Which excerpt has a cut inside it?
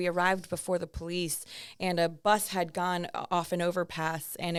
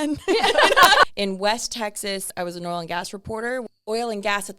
second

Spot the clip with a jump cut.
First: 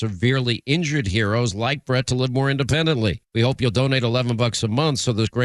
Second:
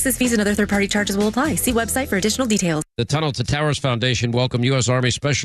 second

